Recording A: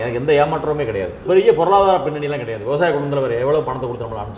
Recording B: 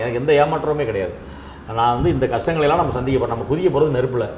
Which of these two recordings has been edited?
A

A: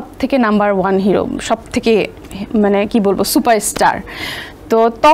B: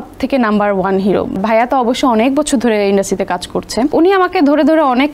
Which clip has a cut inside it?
B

